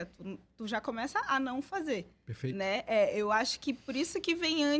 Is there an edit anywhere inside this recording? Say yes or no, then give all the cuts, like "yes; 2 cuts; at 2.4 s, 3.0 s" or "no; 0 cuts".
no; 0 cuts